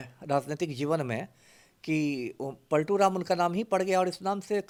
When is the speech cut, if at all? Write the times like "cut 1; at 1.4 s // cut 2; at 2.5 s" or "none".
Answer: none